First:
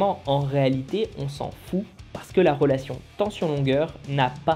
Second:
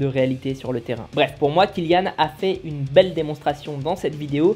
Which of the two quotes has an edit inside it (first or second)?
second